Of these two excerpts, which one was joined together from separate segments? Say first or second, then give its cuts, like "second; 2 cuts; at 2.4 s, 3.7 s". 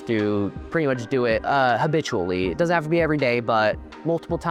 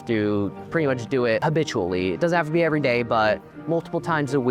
second; 1 cut; at 1.4 s